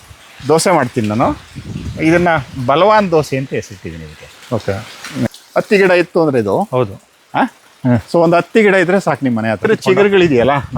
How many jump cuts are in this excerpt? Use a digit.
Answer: 2